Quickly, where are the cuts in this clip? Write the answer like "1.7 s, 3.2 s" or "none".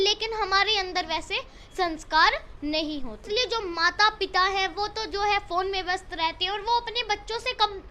3.2 s